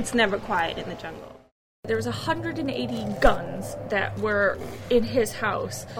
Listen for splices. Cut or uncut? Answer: cut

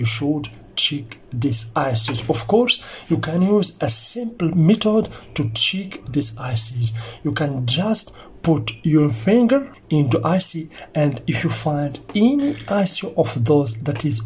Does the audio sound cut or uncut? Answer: uncut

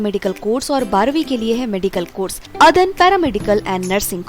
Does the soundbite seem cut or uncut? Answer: cut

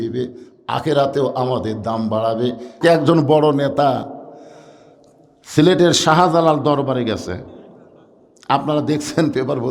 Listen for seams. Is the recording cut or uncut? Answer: cut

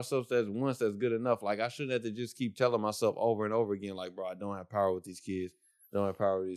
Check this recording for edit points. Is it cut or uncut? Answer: uncut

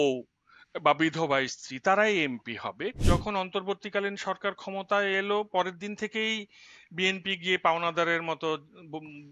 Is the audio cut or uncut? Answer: cut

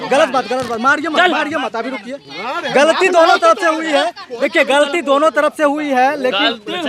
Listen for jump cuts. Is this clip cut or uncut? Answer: uncut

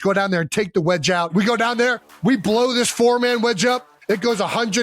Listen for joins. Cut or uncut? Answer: cut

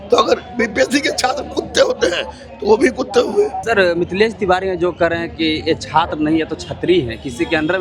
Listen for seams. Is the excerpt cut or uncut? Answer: cut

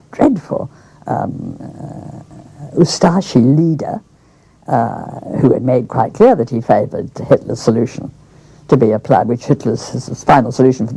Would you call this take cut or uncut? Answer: uncut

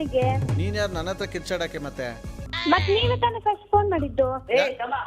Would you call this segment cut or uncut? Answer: cut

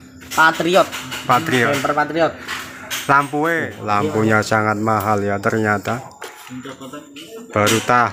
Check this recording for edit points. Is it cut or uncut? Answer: cut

